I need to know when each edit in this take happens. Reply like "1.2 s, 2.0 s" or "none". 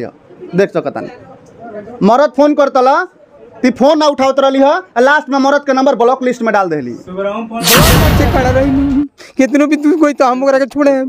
8.0 s